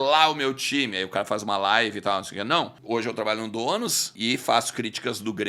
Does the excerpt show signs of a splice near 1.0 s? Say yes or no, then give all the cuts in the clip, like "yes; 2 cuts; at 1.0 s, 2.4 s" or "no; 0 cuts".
no; 2 cuts; at 2.8 s, 4.1 s